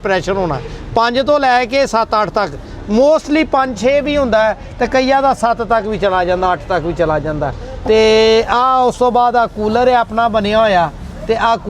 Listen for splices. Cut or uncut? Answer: uncut